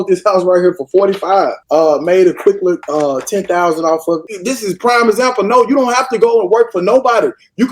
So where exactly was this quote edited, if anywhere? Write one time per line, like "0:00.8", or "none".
0:01.6
0:02.8
0:04.4